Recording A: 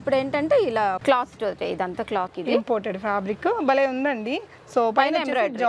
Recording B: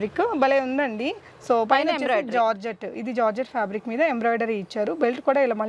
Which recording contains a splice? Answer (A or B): A